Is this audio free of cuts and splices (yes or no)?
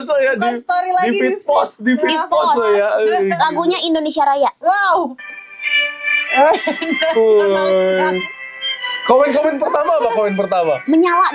yes